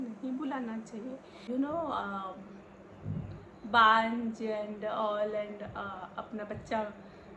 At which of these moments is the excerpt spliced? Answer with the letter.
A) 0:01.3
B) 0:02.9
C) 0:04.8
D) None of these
A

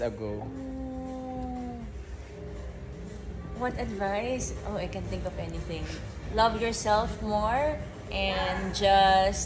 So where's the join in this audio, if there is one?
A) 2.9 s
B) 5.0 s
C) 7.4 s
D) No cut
D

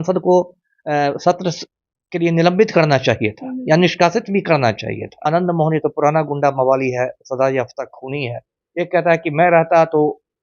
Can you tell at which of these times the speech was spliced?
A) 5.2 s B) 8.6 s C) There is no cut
A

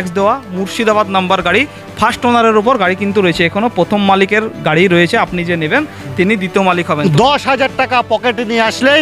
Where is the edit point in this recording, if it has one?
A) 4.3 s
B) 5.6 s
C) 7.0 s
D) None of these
C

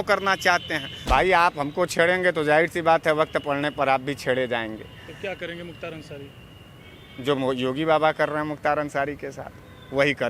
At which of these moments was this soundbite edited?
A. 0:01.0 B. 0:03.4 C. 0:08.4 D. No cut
A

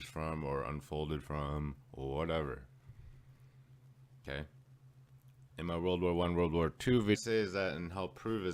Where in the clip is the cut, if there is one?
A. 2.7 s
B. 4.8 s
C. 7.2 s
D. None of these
D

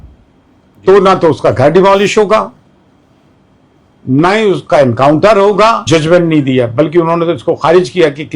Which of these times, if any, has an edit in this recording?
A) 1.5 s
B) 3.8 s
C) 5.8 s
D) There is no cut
C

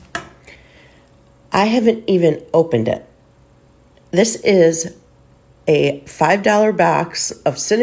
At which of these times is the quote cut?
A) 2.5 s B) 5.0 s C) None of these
C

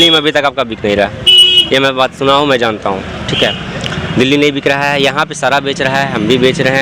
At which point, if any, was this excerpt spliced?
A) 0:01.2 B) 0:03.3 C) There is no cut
C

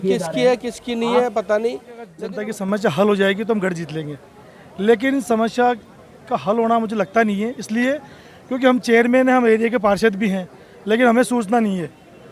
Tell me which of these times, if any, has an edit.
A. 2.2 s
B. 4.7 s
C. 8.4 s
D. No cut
A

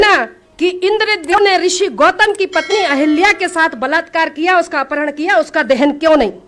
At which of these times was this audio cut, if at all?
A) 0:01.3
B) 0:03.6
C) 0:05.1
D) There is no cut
A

